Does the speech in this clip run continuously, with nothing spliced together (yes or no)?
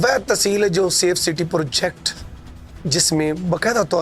yes